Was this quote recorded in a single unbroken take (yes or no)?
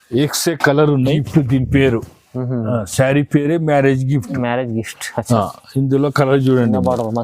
no